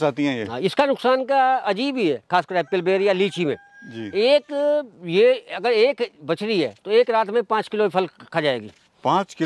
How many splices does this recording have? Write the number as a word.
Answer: zero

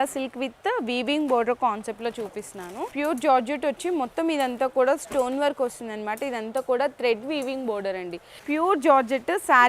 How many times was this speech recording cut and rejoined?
two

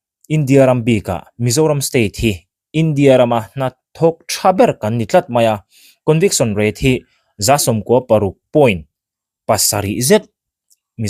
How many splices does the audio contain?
zero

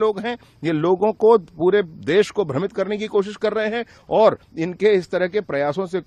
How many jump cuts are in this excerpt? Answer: zero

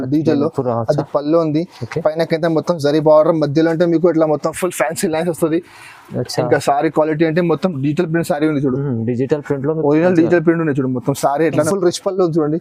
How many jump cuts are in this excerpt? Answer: one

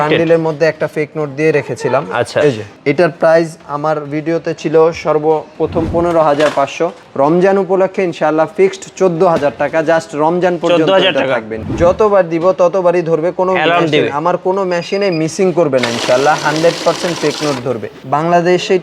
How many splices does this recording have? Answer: four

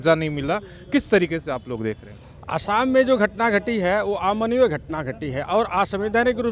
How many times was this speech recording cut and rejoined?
zero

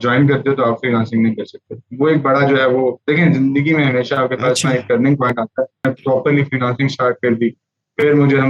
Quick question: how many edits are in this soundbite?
one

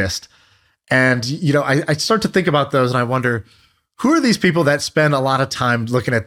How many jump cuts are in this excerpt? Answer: zero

